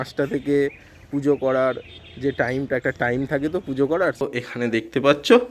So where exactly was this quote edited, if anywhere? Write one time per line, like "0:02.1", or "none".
0:04.2